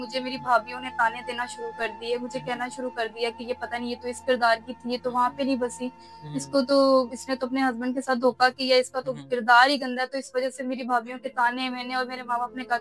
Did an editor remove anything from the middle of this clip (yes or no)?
no